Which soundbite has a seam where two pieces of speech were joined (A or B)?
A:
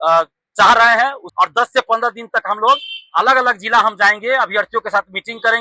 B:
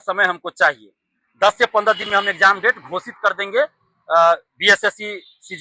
A